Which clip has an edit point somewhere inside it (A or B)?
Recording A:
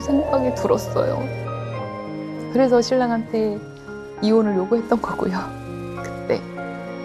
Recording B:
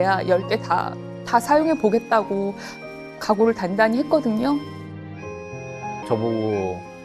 B